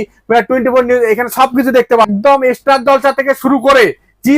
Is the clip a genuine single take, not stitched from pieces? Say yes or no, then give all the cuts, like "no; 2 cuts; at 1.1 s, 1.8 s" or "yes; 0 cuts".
no; 1 cut; at 2.1 s